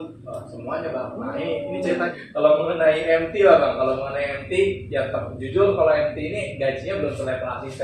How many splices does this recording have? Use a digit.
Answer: 1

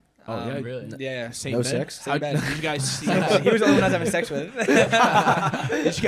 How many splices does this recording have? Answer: 0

